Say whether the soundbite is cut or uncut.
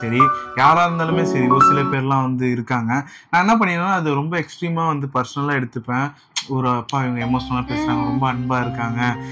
uncut